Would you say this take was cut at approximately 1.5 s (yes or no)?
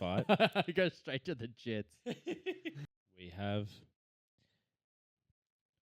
no